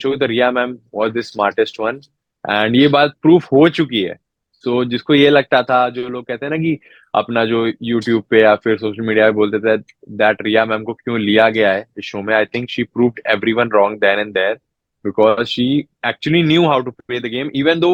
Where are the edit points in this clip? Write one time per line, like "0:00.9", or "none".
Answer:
none